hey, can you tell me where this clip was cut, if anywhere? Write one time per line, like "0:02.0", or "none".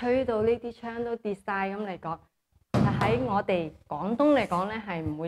none